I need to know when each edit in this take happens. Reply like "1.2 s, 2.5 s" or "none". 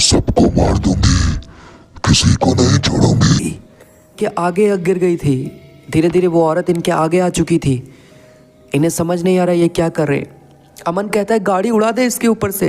4.1 s

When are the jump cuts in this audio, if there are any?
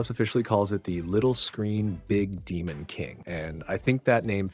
3.2 s

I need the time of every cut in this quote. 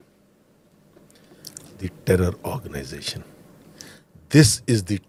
none

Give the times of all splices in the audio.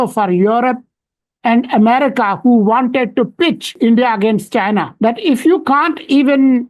3.7 s, 4.9 s

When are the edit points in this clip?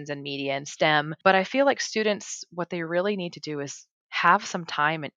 1.1 s

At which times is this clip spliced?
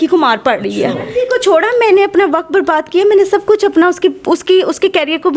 1.1 s

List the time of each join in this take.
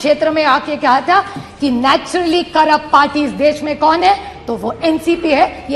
none

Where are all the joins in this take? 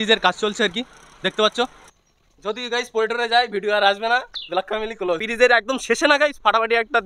1.8 s, 5.3 s

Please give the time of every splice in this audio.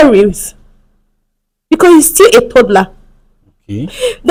none

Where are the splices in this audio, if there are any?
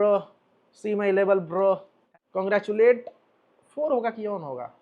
2.1 s

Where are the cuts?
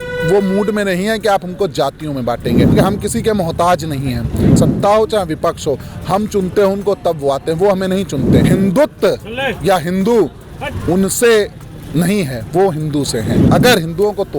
2.7 s, 4.6 s, 8.4 s, 13.4 s

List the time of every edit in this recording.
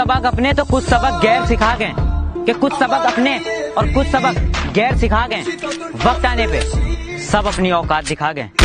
none

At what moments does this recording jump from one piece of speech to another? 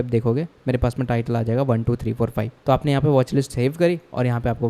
2.5 s

